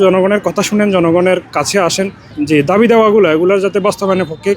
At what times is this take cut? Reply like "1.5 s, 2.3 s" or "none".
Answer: 2.3 s